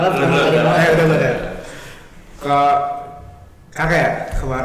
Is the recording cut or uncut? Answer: uncut